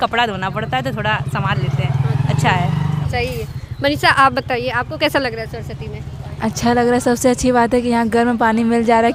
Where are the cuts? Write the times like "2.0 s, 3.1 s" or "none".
none